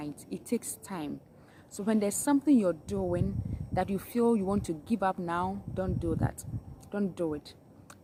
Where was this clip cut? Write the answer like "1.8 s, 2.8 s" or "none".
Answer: none